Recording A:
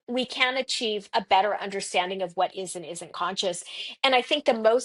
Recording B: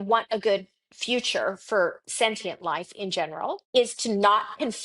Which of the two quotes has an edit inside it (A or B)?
B